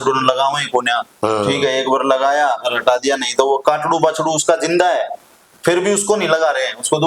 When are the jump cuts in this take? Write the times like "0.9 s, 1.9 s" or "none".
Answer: none